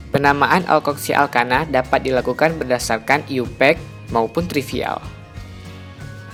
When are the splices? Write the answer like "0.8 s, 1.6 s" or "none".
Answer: none